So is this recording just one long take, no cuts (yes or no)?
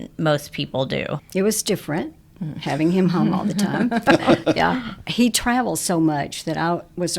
no